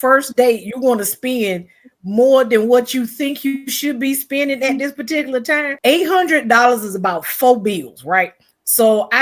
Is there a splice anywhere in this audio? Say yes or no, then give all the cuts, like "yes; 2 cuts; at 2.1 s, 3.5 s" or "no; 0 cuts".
yes; 1 cut; at 5.7 s